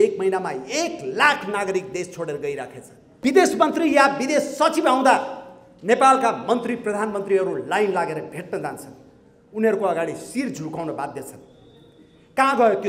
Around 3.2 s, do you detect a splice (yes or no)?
yes